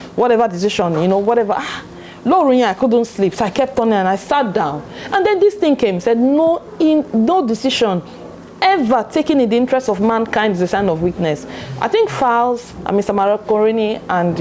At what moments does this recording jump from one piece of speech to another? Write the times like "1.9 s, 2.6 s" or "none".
none